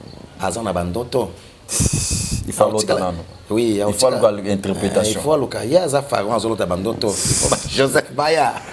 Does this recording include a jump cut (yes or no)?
no